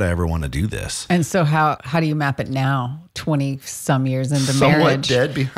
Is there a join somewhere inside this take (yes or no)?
yes